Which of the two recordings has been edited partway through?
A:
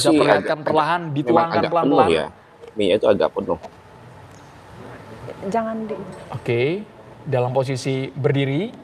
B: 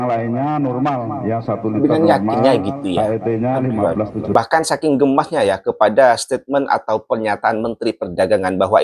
B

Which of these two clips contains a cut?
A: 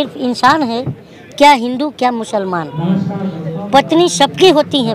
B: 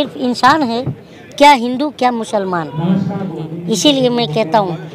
B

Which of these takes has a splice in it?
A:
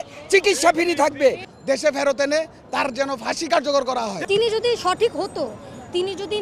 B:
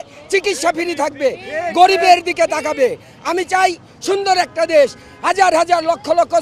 A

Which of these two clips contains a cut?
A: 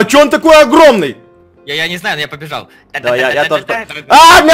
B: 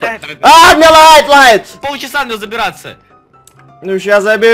B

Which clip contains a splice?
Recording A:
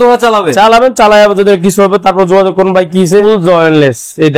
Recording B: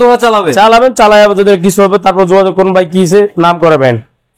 A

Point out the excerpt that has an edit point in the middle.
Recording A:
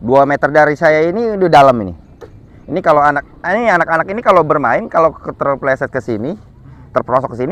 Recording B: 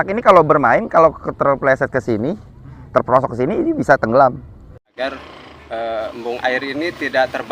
B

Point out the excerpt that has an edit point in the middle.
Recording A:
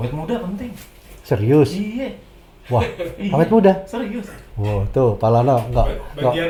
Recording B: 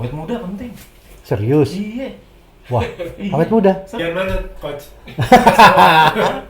B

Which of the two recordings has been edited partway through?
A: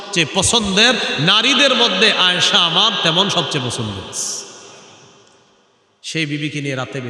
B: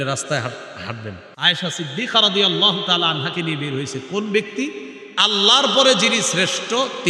B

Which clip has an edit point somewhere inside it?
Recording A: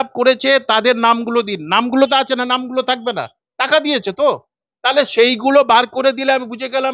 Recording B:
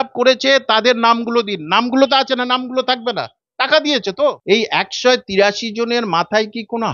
B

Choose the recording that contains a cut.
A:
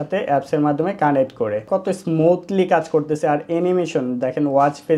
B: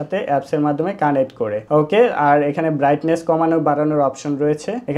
A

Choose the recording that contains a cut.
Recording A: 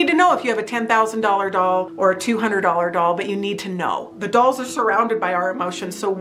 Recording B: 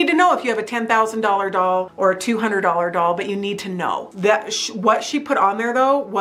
A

